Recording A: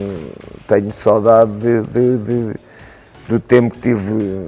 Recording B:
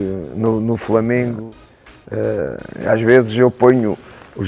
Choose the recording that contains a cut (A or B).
B